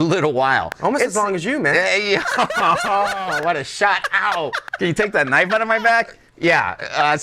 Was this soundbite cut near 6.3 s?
no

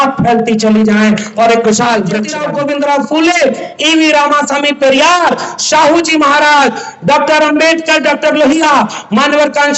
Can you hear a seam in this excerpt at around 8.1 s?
no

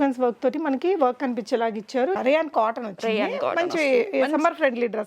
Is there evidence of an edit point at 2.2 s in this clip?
yes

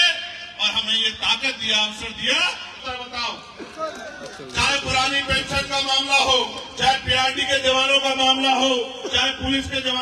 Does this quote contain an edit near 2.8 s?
yes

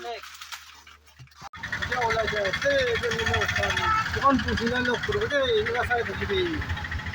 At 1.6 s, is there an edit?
no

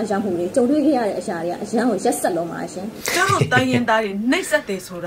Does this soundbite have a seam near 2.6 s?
yes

